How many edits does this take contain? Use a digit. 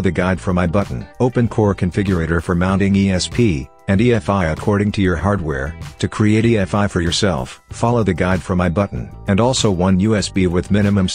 1